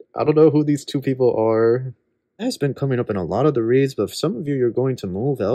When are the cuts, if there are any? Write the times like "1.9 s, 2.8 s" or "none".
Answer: 2.4 s